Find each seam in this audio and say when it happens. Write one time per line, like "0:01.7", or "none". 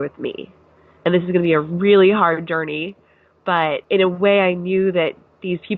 0:03.8